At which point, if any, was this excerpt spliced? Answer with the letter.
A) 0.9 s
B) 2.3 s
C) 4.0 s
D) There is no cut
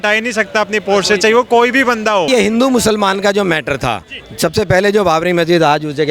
B